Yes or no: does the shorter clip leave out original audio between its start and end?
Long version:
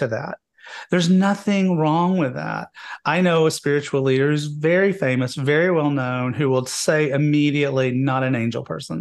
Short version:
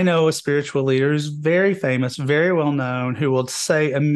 no